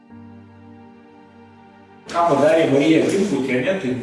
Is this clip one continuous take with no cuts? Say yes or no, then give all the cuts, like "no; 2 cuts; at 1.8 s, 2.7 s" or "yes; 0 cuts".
no; 1 cut; at 2.0 s